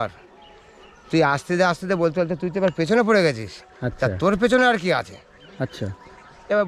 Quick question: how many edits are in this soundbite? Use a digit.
0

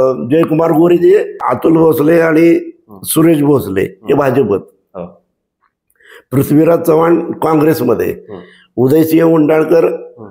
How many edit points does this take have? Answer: 1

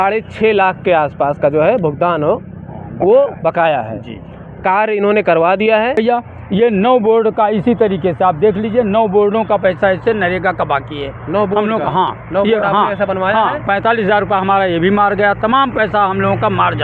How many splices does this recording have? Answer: 1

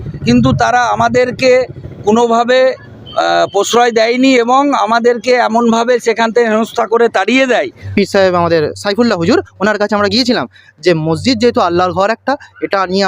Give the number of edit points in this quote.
1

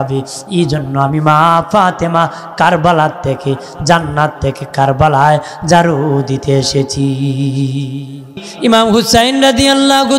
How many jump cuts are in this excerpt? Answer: 1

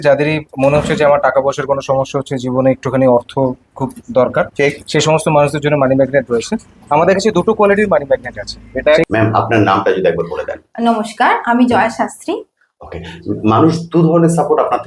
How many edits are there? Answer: 1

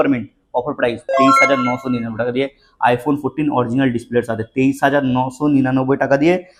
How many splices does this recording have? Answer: 0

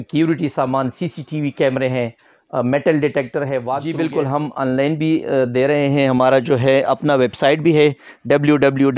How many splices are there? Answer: 1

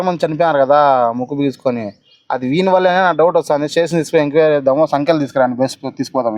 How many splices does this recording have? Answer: 0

